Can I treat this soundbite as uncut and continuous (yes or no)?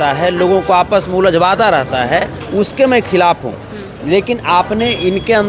yes